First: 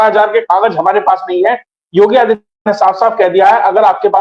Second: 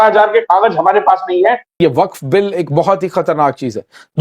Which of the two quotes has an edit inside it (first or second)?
second